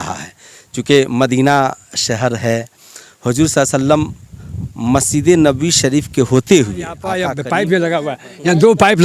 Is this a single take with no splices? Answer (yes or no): no